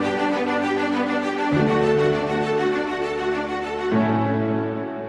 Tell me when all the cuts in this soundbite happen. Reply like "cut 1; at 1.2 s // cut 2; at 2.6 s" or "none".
none